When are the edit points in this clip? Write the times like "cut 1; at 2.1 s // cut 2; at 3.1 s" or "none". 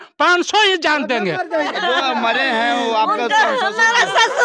cut 1; at 1.7 s